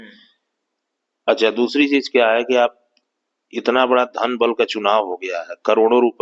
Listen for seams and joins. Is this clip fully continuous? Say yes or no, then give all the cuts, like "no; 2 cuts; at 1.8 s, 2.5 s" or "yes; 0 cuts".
yes; 0 cuts